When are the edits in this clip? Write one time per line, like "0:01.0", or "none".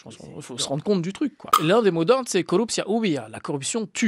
0:01.6